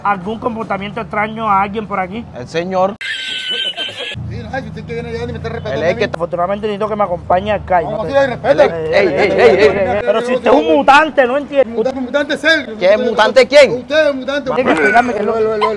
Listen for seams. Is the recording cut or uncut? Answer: cut